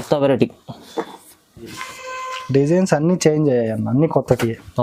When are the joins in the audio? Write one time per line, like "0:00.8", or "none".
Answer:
none